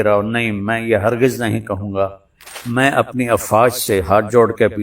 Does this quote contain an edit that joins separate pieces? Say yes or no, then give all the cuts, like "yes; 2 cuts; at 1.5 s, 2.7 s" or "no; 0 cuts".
yes; 1 cut; at 2.5 s